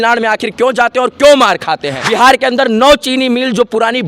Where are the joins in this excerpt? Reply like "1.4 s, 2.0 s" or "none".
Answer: 2.0 s